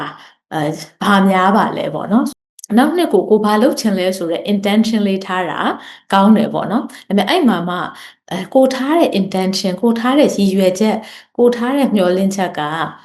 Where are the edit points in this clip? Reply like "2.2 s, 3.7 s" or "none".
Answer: 2.3 s